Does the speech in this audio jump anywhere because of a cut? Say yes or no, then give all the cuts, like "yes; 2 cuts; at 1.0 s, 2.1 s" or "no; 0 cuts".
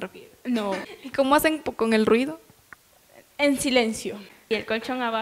yes; 2 cuts; at 0.9 s, 4.3 s